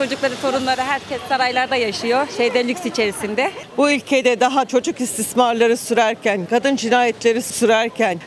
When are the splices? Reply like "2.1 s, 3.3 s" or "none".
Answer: 3.6 s